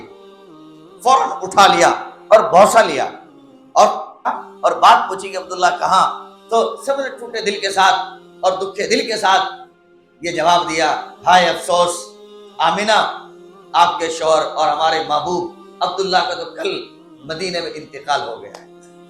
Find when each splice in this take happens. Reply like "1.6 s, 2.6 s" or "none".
4.3 s